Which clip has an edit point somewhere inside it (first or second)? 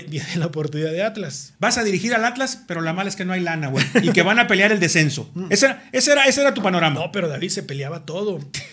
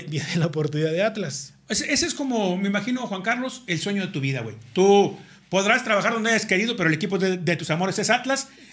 first